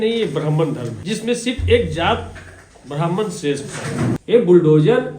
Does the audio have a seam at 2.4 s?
no; 2 cuts; at 0.9 s, 4.1 s

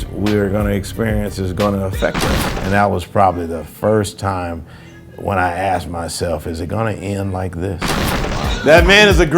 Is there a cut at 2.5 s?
yes; 2 cuts; at 2.5 s, 8.0 s

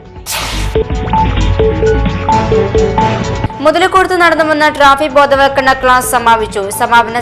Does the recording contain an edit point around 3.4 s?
yes; 1 cut; at 3.4 s

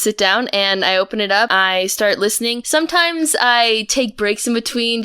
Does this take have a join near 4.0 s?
no; 2 cuts; at 1.5 s, 2.6 s

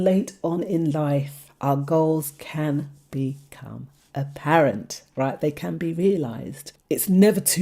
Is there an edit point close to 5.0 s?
no; 1 cut; at 6.7 s

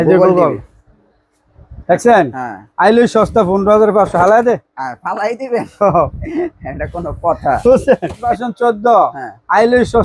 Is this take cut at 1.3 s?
no; 1 cut; at 8.4 s

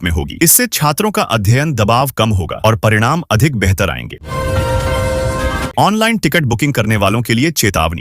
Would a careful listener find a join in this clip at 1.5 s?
no; 2 cuts; at 4.2 s, 5.7 s

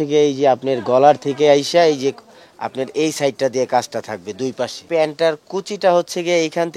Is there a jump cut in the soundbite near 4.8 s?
yes; 1 cut; at 4.8 s

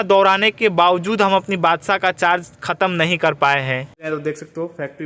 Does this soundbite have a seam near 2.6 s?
no; 1 cut; at 4.1 s

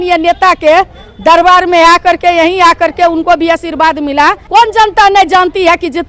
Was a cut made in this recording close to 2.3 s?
no; 1 cut; at 4.4 s

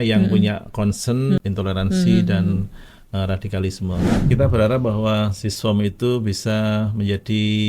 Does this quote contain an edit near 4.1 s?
yes; 2 cuts; at 1.4 s, 4.1 s

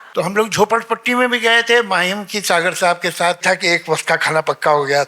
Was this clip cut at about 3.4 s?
yes; 1 cut; at 3.4 s

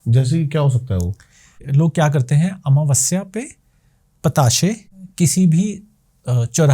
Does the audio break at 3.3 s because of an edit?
no; 2 cuts; at 1.6 s, 5.0 s

